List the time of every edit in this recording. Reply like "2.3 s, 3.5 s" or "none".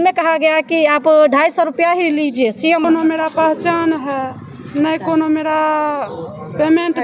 2.8 s

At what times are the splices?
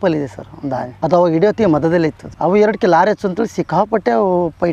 2.2 s

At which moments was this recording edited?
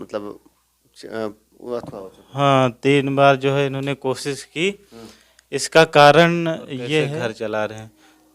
7.2 s

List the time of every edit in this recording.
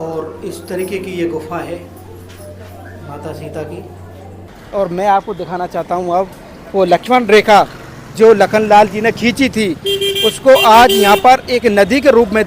4.6 s

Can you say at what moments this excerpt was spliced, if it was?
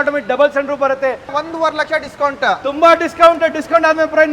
1.4 s

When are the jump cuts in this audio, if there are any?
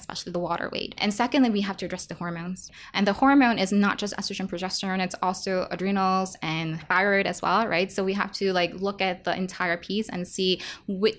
1.0 s, 2.7 s, 6.8 s

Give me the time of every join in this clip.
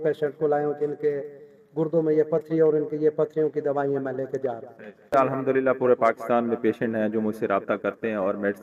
5.1 s

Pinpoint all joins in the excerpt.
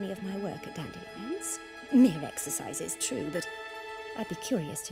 none

